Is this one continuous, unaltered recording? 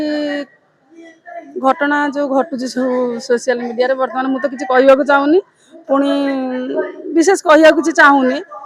yes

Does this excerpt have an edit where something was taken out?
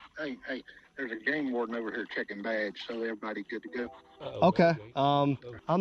no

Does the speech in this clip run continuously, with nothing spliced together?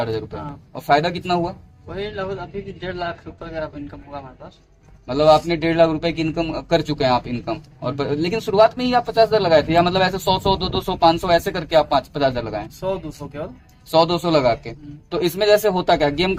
yes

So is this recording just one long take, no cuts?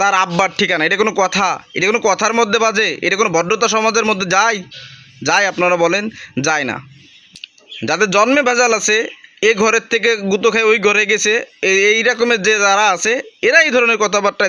yes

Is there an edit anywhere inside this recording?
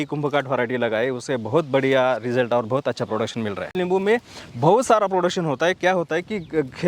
yes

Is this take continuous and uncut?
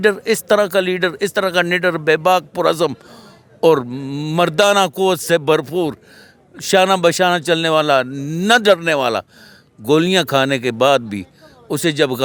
yes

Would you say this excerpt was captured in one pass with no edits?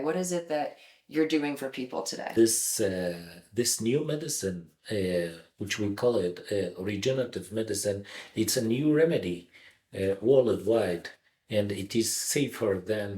no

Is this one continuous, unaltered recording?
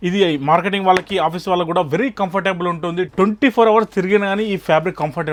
yes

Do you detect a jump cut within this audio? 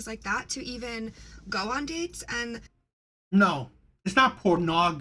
no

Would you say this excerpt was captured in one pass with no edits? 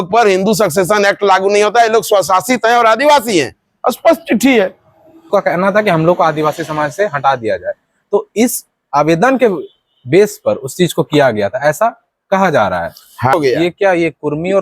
no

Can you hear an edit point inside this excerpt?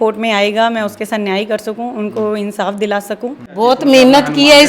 yes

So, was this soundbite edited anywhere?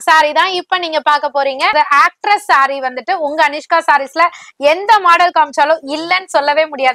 yes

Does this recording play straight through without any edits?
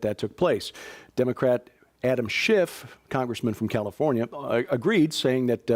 no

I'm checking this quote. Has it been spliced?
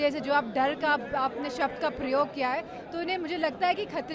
no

